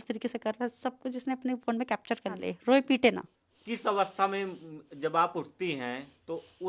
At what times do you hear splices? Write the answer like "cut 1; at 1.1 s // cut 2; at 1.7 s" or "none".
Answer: cut 1; at 2.5 s